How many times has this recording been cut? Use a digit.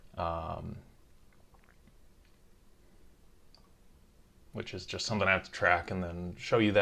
0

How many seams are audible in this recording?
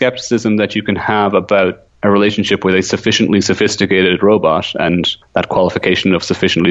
2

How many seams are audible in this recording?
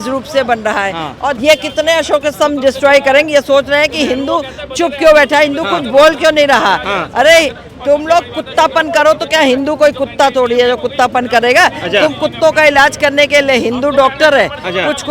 1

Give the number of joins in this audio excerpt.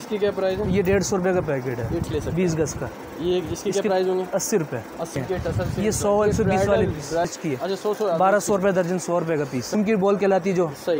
4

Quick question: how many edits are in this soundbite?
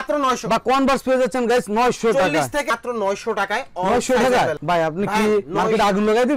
1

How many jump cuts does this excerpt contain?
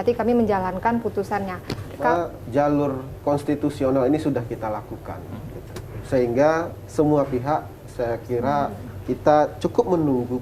1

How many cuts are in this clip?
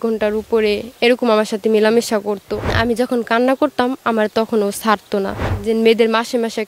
2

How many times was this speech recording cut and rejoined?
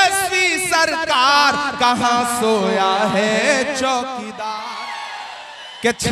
1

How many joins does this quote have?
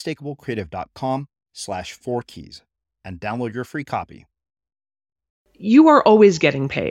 1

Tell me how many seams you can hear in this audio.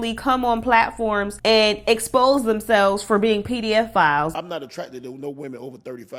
2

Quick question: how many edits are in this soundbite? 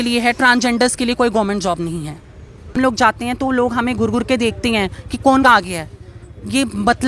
1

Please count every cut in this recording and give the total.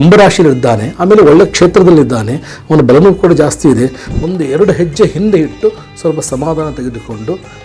1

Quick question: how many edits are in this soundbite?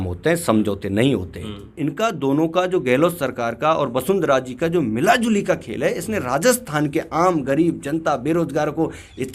1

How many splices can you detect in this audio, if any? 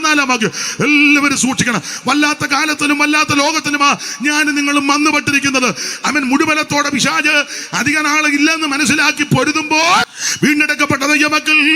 1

